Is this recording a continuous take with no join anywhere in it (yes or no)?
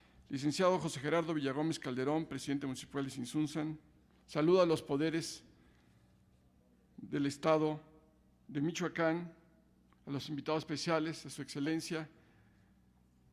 no